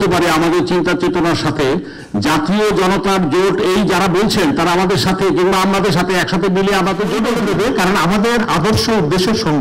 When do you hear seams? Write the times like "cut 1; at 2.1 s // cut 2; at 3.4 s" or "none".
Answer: cut 1; at 7.3 s

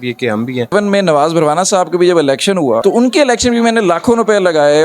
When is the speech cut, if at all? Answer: cut 1; at 0.7 s // cut 2; at 2.8 s

